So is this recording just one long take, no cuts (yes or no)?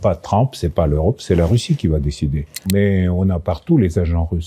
no